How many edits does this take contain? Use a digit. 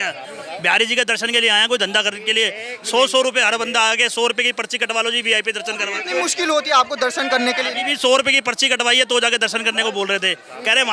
0